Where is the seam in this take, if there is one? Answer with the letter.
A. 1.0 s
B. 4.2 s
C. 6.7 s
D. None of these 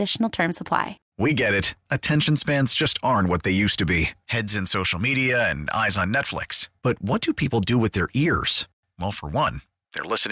A